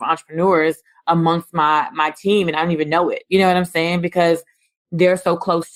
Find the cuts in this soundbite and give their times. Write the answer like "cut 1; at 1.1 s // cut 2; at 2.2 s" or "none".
none